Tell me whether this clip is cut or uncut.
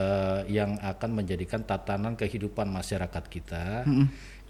uncut